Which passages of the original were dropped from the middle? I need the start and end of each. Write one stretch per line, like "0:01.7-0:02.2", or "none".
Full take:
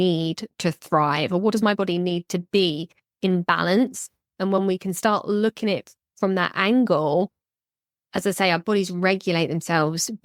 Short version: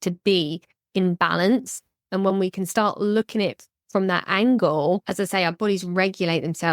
0:07.3-0:08.1